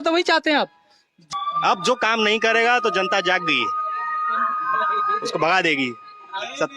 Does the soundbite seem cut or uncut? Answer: cut